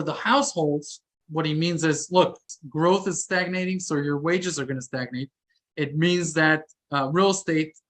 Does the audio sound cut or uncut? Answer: cut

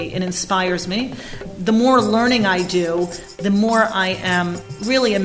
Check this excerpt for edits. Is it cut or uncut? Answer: cut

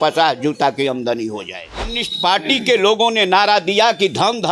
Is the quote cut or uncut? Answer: cut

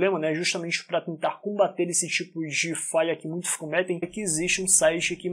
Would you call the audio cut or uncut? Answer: uncut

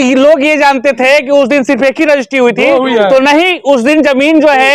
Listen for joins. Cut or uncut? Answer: uncut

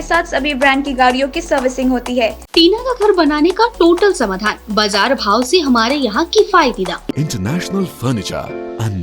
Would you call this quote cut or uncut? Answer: cut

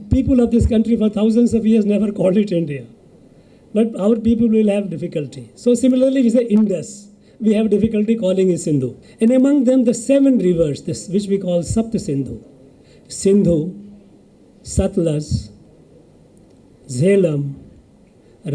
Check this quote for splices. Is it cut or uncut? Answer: cut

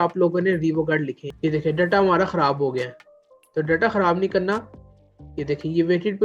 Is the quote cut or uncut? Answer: cut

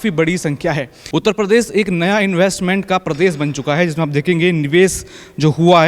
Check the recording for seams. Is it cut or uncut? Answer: cut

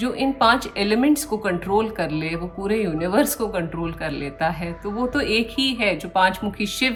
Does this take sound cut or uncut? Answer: uncut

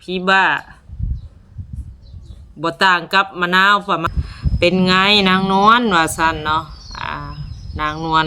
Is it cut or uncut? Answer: cut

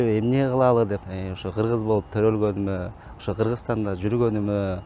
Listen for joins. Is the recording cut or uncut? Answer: cut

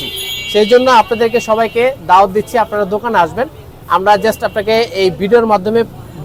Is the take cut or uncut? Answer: uncut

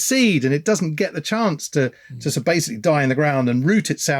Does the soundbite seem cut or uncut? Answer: uncut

